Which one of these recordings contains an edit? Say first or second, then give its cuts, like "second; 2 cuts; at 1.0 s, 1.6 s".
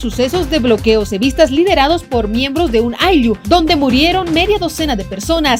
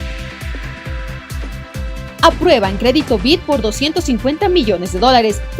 second; 1 cut; at 1.0 s